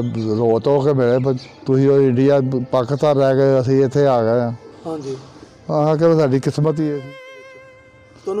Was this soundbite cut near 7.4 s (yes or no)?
yes